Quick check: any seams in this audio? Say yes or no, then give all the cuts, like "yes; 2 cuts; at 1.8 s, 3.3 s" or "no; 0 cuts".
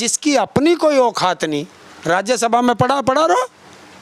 no; 0 cuts